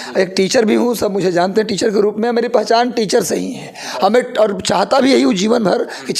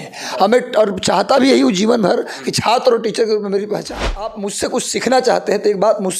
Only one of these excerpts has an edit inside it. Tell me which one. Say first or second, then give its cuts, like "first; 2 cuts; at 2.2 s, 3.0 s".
second; 1 cut; at 4.4 s